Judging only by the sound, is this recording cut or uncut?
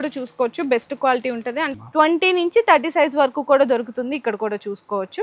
cut